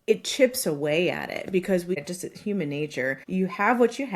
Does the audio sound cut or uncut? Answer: cut